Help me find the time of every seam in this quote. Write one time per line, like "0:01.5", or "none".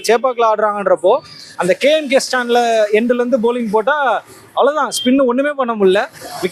none